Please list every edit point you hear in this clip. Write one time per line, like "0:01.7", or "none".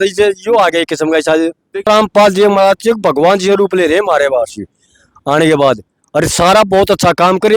0:01.8